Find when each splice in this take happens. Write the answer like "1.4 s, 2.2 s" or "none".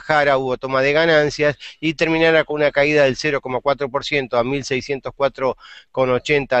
none